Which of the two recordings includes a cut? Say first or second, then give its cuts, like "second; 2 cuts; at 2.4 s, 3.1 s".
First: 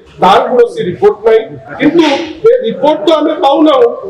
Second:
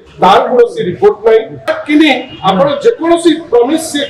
second; 1 cut; at 1.7 s